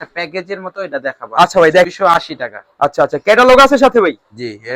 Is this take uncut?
no; 1 cut; at 1.9 s

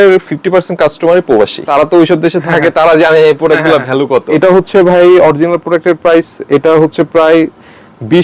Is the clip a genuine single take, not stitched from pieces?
no; 2 cuts; at 1.7 s, 4.4 s

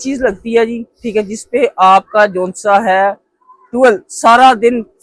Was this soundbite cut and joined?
no; 0 cuts

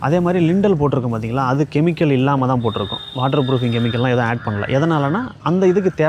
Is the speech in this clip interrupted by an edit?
no; 0 cuts

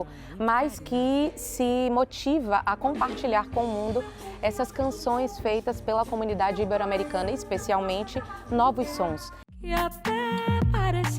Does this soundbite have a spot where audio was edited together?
yes; 1 cut; at 9.3 s

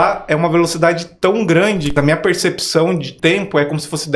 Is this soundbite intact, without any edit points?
no; 2 cuts; at 1.9 s, 3.1 s

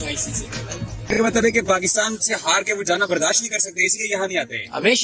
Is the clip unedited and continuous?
no; 1 cut; at 1.1 s

